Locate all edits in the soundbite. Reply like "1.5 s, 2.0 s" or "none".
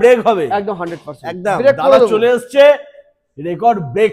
none

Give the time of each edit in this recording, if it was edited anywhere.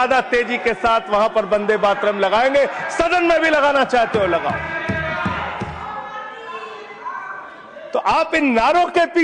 none

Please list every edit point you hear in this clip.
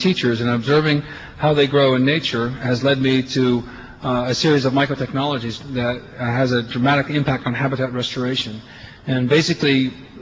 7.7 s

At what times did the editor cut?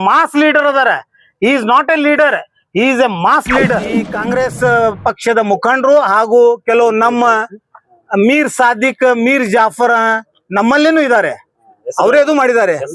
4.1 s

